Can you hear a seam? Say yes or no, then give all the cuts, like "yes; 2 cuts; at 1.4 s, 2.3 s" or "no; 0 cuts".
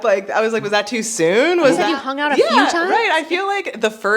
yes; 1 cut; at 1.8 s